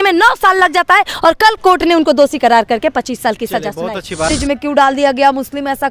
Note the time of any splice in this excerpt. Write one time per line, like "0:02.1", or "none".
0:04.3